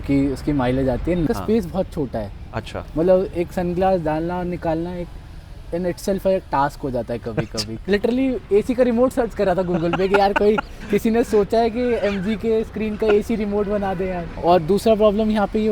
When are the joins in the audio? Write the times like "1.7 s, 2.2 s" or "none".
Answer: 1.3 s, 7.8 s, 14.3 s